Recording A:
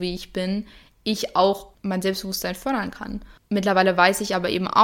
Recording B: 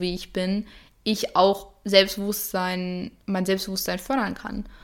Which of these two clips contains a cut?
A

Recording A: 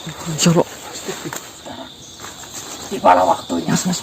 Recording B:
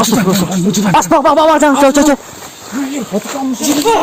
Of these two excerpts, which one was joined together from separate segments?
A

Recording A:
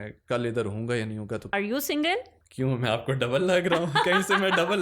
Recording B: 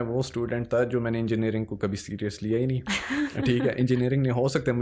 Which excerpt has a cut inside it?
A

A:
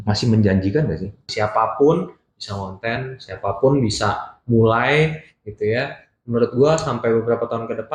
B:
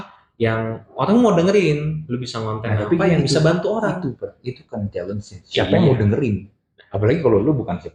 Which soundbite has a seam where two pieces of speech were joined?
A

